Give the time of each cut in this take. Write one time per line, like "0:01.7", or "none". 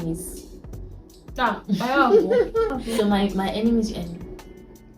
0:02.8